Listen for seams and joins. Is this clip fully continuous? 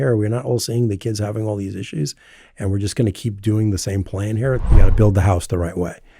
no; 1 cut; at 4.6 s

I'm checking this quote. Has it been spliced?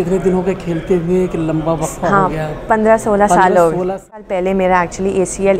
yes; 1 cut; at 4.3 s

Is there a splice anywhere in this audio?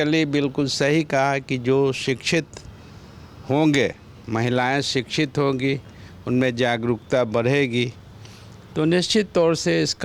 no; 0 cuts

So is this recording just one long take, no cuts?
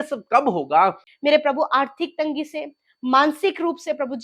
no; 1 cut; at 1.1 s

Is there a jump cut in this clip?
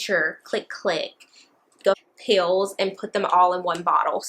yes; 1 cut; at 2.0 s

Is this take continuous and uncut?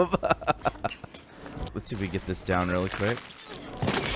no; 1 cut; at 1.7 s

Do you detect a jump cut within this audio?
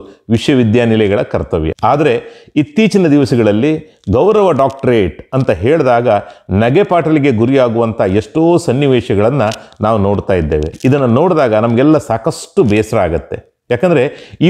yes; 2 cuts; at 1.7 s, 10.7 s

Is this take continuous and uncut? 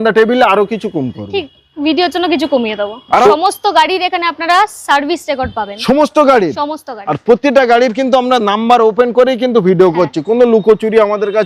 no; 1 cut; at 3.2 s

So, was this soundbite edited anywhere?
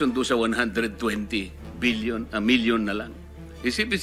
no; 0 cuts

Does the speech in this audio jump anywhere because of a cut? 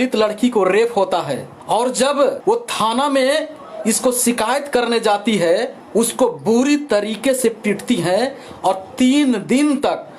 yes; 3 cuts; at 1.5 s, 2.4 s, 5.8 s

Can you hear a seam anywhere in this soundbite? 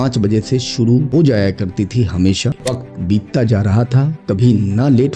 yes; 1 cut; at 2.5 s

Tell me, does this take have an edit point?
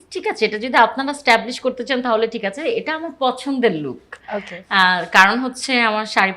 no; 0 cuts

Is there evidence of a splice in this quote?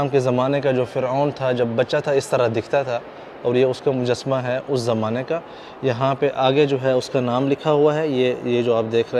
no; 0 cuts

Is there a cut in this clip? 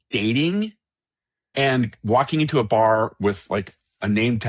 no; 0 cuts

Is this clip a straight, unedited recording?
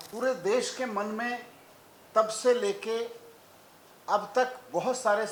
yes; 0 cuts

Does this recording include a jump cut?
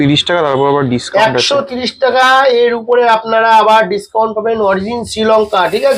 no; 0 cuts

